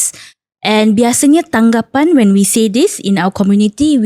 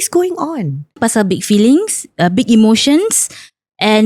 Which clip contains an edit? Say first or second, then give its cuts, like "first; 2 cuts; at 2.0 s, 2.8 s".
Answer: second; 1 cut; at 1.0 s